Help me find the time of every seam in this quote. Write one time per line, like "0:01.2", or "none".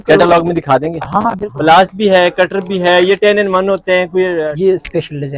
0:01.4
0:04.4